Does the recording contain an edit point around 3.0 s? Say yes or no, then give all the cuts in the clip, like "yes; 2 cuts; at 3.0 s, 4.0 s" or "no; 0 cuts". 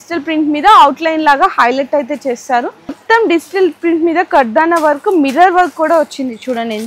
yes; 1 cut; at 3.0 s